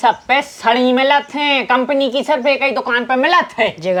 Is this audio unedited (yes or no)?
yes